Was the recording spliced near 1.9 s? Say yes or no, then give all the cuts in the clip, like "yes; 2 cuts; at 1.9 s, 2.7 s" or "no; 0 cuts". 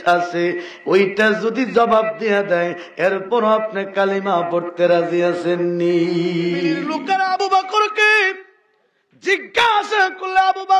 no; 1 cut; at 6.9 s